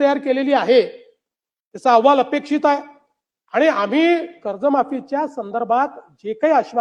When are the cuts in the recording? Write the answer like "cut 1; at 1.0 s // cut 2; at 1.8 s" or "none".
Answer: none